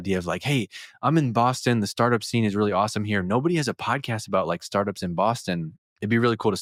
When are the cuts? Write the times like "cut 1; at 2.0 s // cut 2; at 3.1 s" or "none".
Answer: none